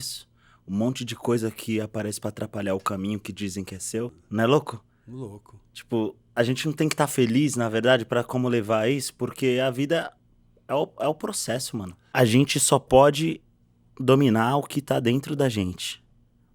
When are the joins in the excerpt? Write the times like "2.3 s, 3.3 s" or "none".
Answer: 4.2 s, 12.0 s